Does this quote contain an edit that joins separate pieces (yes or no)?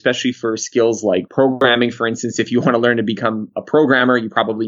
no